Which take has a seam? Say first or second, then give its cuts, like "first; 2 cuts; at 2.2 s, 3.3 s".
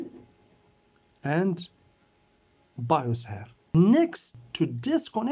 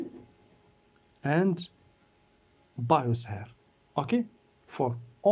first; 2 cuts; at 3.7 s, 4.3 s